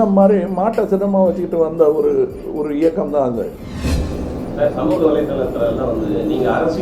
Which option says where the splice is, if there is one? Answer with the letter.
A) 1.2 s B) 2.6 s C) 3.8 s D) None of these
C